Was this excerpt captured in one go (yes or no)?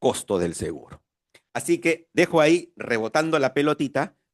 yes